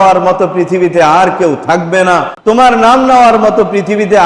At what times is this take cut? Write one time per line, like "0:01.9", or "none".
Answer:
0:02.3